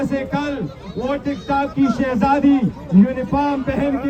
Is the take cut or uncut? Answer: uncut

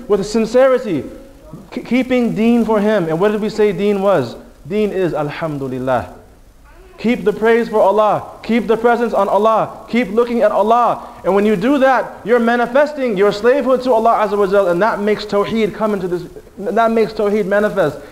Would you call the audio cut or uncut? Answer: uncut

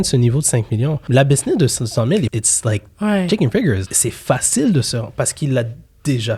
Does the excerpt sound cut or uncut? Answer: cut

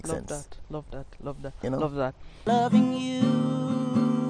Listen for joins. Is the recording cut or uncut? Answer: cut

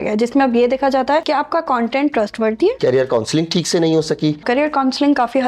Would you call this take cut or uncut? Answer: cut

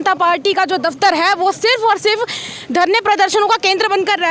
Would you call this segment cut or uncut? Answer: uncut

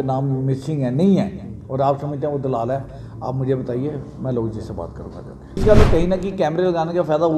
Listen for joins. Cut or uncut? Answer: cut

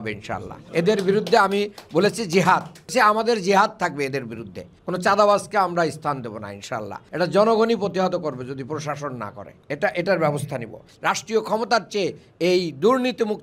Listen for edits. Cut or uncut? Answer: cut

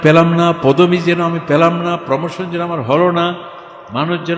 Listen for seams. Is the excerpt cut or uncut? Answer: uncut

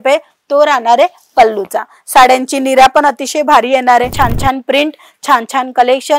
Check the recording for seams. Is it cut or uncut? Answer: cut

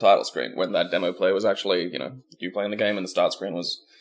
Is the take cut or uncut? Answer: cut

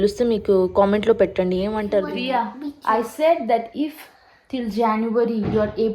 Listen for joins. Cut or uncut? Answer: cut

